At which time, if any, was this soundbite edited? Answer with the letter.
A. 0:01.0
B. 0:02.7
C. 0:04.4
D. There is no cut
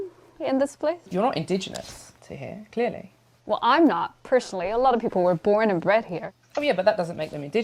A